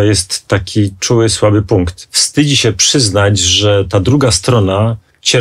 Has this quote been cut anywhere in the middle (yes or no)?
yes